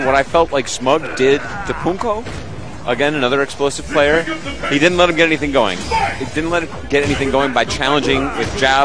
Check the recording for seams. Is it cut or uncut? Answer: cut